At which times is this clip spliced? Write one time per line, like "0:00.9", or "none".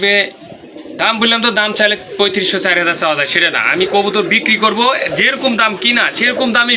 none